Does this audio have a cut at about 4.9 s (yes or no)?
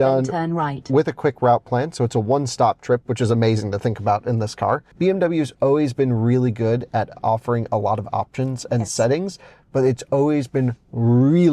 yes